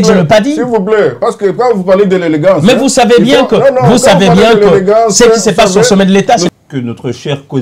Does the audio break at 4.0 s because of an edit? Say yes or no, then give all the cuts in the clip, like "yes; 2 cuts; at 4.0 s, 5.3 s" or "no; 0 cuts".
no; 1 cut; at 6.5 s